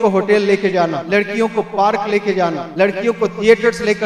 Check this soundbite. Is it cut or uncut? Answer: cut